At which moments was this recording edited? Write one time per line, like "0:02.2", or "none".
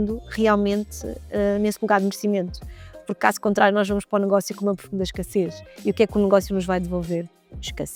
none